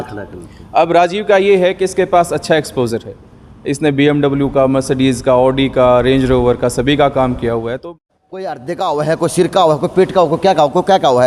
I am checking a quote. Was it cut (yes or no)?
yes